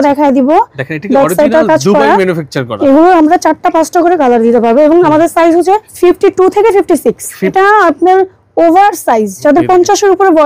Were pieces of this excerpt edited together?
yes; 4 cuts; at 2.6 s, 5.9 s, 7.5 s, 9.3 s

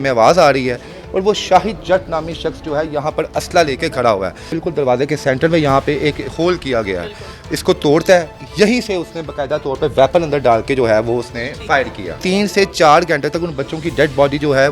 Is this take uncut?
no; 3 cuts; at 4.5 s, 8.4 s, 12.2 s

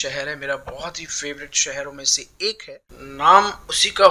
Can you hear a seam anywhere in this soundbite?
yes; 1 cut; at 2.6 s

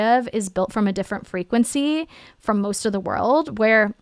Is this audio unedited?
yes; 0 cuts

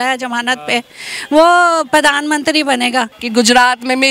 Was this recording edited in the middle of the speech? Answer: yes; 1 cut; at 3.2 s

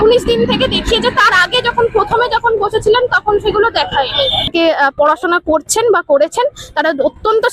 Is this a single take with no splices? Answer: no; 1 cut; at 4.5 s

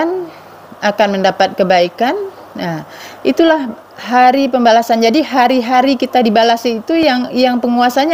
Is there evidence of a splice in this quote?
no; 0 cuts

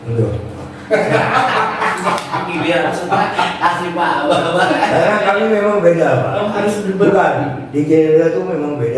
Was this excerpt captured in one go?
yes; 0 cuts

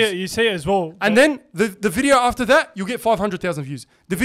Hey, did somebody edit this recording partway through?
no; 0 cuts

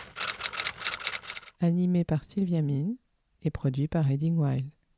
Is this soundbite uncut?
yes; 0 cuts

